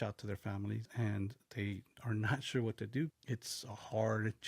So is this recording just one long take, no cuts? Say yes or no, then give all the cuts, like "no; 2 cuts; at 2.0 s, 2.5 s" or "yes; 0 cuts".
no; 1 cut; at 3.2 s